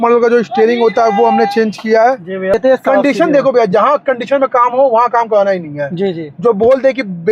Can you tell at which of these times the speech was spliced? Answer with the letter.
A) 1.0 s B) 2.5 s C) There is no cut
B